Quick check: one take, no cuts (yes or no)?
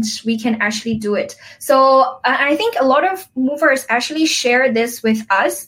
yes